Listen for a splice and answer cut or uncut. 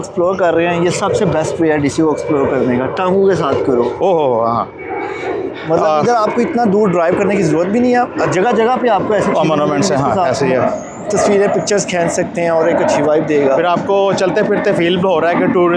uncut